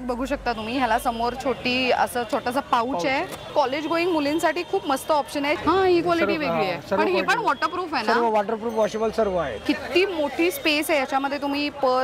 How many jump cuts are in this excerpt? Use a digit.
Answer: 3